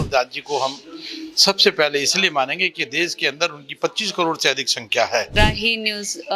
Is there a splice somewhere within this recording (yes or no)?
yes